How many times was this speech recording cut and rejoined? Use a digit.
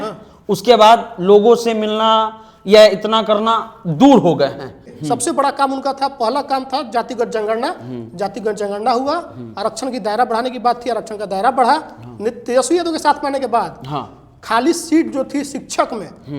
1